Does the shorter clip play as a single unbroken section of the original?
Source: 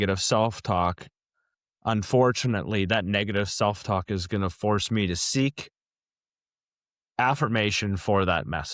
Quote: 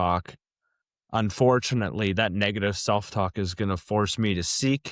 yes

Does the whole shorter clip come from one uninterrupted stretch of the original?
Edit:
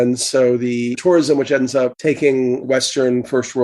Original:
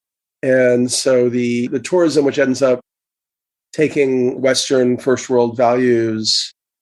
no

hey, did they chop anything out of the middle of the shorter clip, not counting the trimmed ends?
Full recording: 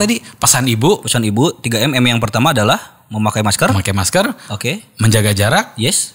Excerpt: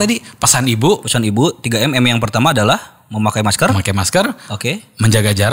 no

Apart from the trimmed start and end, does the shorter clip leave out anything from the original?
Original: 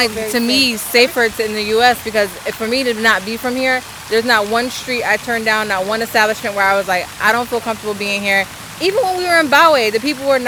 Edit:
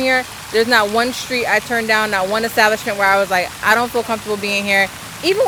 no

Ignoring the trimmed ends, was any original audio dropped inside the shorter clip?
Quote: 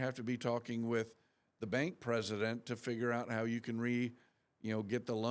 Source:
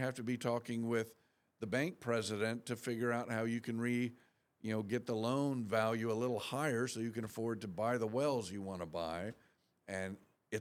no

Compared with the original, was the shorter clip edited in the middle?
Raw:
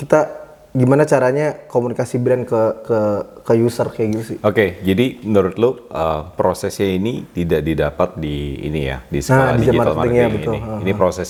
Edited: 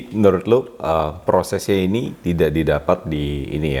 no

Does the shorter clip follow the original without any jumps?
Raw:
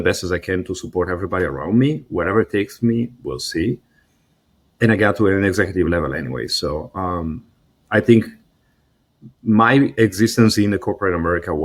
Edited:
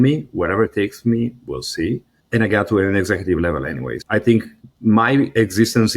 no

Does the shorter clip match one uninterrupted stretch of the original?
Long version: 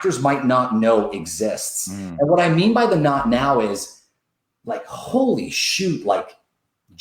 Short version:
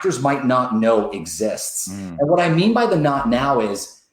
yes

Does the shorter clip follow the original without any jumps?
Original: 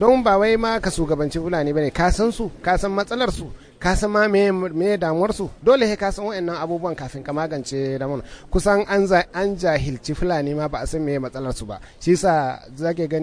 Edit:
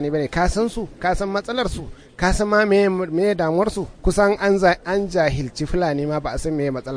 no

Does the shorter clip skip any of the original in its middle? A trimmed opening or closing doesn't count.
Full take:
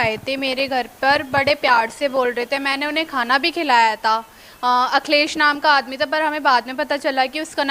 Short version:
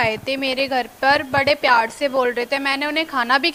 no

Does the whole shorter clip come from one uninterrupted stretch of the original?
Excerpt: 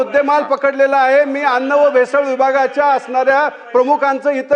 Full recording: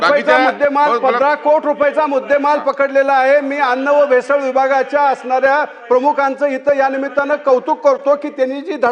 yes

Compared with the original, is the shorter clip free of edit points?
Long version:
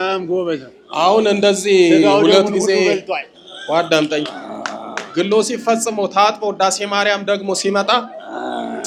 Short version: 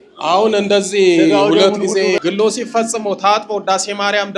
no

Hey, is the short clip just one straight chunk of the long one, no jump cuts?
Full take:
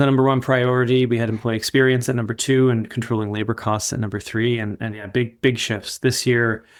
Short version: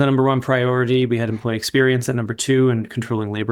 yes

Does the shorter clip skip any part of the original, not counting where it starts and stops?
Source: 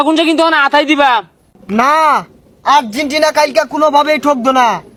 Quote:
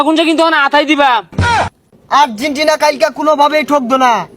yes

